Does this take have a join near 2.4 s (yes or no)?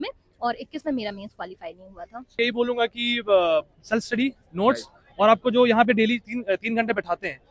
yes